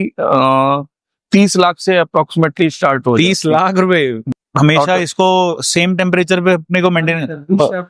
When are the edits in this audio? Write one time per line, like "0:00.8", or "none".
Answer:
0:04.2